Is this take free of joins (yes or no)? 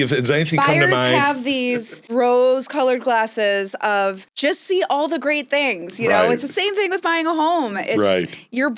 no